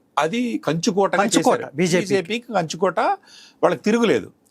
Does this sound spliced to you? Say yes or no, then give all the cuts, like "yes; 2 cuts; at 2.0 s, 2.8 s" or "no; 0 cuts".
no; 0 cuts